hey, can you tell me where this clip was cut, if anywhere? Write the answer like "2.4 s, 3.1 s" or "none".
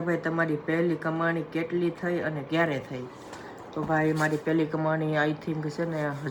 none